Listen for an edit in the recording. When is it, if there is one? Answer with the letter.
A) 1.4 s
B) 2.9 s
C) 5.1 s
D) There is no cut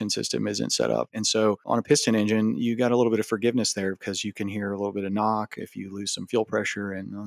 A